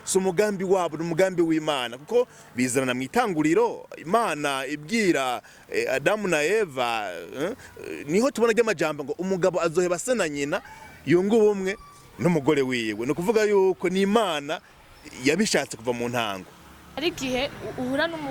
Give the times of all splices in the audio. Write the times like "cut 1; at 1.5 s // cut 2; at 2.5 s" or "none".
cut 1; at 17.0 s